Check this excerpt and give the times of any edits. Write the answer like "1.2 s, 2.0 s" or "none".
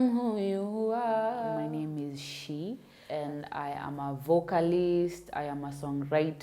1.6 s, 2.9 s